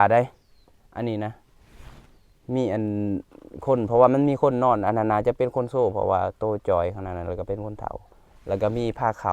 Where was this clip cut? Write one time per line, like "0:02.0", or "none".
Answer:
none